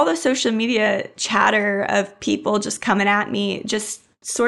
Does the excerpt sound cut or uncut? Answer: uncut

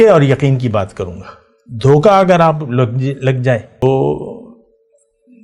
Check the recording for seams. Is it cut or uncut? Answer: cut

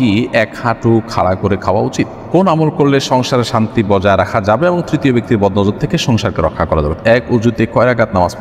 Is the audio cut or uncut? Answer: cut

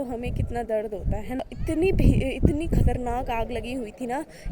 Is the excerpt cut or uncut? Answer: cut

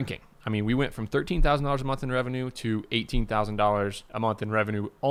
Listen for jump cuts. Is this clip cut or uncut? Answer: uncut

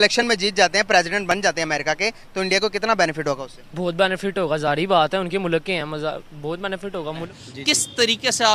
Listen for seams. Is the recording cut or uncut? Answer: cut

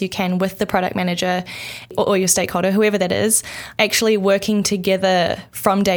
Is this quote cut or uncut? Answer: cut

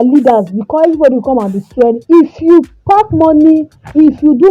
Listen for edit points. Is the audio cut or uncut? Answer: uncut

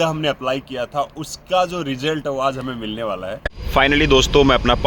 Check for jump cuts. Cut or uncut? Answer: cut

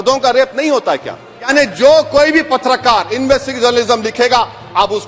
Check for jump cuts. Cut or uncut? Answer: cut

